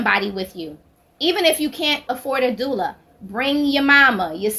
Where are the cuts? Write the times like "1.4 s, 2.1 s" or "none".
2.1 s